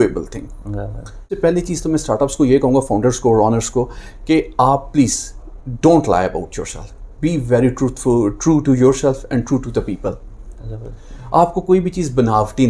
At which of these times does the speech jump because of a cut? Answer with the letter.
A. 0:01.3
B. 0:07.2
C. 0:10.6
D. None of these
A